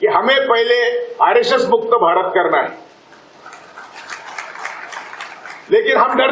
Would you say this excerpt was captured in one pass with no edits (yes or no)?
yes